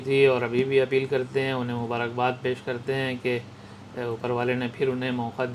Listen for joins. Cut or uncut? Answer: uncut